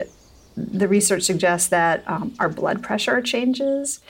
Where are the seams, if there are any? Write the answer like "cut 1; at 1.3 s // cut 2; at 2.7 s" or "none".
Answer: none